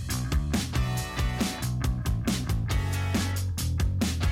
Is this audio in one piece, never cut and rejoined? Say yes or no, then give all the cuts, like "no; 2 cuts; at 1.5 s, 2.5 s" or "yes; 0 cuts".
no; 1 cut; at 1.9 s